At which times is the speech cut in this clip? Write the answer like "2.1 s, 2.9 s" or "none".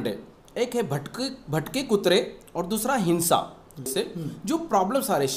3.9 s